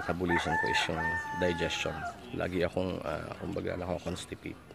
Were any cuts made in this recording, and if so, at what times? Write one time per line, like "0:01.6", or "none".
none